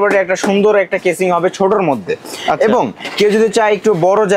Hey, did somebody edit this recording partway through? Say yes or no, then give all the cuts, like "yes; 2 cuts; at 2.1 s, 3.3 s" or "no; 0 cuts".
no; 0 cuts